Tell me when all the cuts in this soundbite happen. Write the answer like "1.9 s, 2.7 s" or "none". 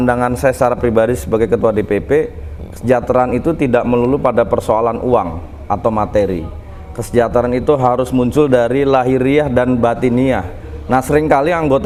none